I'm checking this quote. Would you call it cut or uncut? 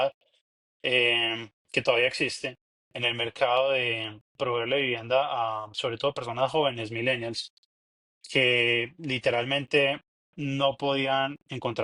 uncut